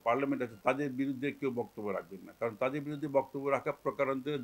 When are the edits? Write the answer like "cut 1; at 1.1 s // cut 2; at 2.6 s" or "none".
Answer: none